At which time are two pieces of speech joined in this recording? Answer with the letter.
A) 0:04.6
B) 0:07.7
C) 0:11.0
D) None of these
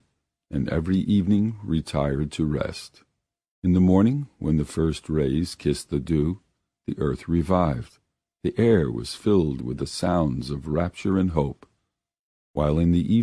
C